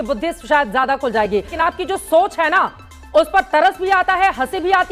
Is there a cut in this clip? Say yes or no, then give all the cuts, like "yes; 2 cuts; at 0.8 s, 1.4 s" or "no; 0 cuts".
yes; 1 cut; at 1.6 s